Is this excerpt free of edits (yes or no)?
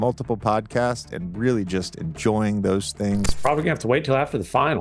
no